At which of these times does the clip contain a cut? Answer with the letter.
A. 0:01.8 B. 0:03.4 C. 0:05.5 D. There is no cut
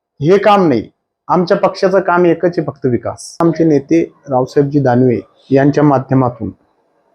B